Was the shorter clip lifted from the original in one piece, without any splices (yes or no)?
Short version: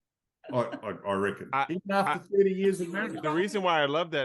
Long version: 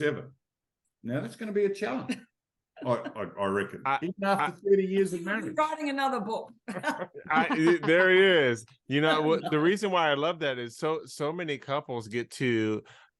no